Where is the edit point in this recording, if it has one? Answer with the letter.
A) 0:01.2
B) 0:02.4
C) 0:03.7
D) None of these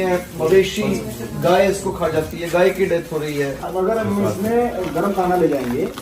C